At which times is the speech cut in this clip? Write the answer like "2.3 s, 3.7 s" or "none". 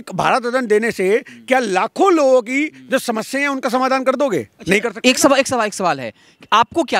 none